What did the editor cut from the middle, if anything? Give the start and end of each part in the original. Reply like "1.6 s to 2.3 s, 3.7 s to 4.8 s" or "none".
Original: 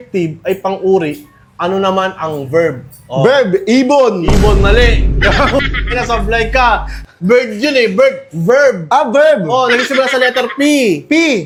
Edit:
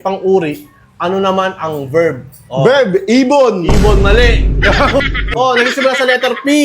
5.9 s to 9.4 s